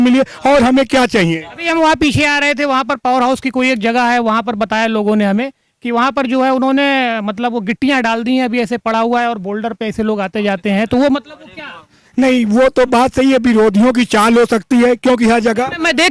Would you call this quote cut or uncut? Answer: uncut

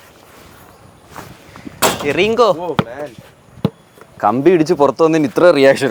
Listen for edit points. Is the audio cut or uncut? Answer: uncut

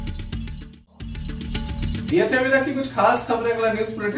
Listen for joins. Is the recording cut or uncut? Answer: uncut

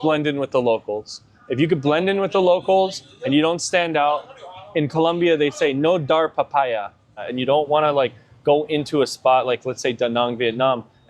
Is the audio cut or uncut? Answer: cut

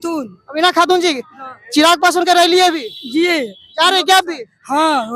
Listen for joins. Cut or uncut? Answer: uncut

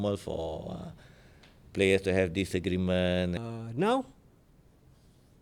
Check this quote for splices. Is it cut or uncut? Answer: cut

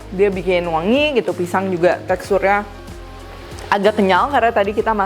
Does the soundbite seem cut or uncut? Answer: uncut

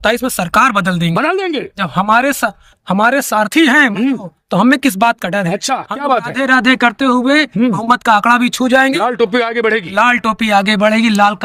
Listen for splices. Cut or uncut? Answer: uncut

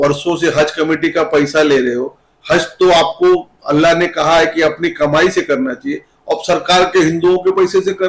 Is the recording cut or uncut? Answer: uncut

